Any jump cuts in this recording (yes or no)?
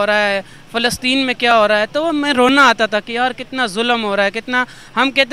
no